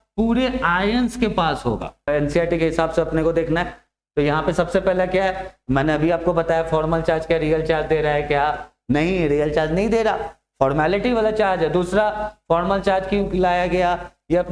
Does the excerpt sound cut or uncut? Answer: cut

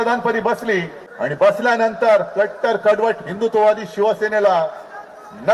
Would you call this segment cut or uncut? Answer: cut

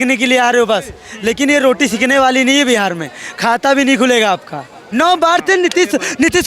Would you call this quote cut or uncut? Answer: cut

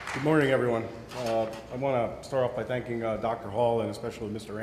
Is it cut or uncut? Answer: uncut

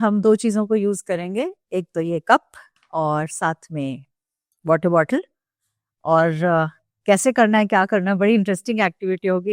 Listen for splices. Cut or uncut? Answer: uncut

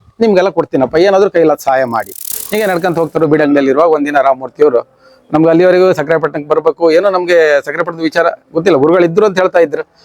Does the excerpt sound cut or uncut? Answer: cut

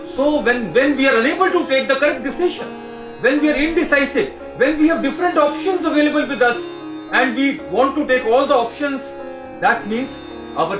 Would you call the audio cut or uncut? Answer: uncut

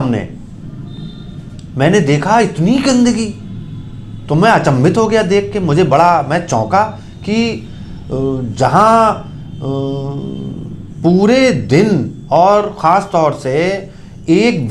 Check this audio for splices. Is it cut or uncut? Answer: uncut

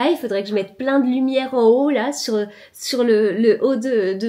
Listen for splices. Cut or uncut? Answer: uncut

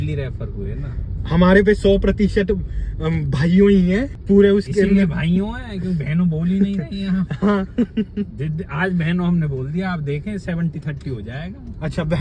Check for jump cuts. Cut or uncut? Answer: uncut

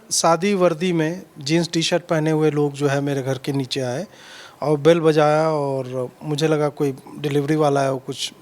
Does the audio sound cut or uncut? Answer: uncut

